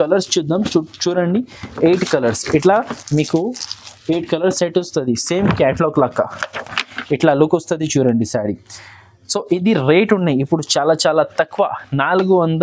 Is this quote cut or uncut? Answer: uncut